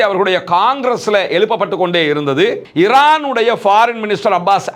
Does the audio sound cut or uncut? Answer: cut